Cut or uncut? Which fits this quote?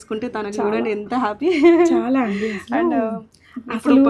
uncut